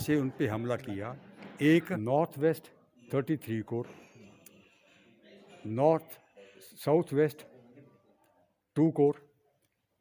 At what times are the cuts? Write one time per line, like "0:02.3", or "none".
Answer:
0:01.9